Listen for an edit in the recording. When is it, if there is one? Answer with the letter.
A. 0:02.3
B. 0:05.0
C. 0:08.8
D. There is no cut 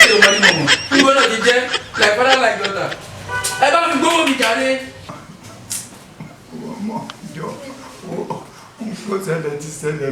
B